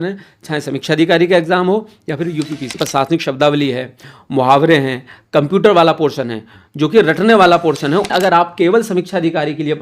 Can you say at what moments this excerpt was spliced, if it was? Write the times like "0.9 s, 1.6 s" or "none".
2.8 s, 8.1 s